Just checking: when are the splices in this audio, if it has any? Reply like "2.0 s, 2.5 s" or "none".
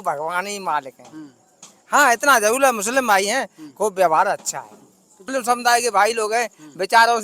5.3 s